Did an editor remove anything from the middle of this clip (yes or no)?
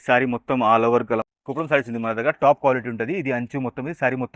yes